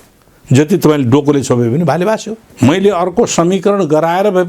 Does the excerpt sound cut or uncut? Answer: cut